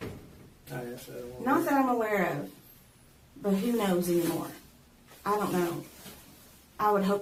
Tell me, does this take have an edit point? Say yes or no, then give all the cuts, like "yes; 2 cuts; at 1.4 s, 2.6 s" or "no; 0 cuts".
no; 0 cuts